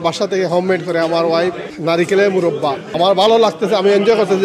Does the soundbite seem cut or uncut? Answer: cut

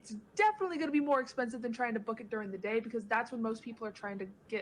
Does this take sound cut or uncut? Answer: cut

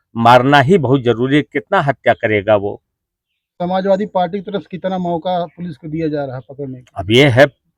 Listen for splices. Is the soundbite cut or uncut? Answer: uncut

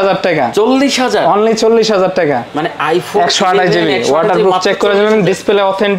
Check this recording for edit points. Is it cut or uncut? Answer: uncut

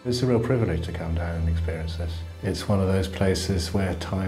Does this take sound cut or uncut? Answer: cut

